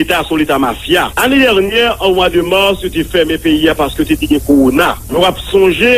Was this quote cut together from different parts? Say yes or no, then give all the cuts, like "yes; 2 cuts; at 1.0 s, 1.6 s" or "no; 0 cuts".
yes; 2 cuts; at 1.1 s, 5.0 s